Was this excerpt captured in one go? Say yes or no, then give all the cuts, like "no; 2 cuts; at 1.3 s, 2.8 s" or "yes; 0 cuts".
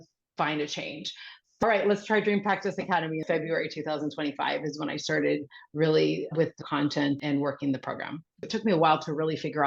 no; 4 cuts; at 1.6 s, 3.2 s, 7.2 s, 8.4 s